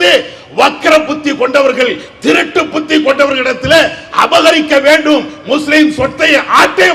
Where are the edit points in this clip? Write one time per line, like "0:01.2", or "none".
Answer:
none